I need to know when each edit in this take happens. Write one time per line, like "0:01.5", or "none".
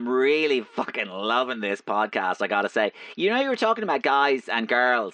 none